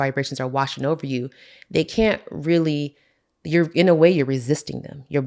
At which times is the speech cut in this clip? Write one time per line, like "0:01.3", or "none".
none